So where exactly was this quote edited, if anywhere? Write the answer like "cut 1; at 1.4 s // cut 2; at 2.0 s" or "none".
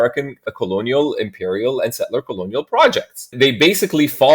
cut 1; at 3.2 s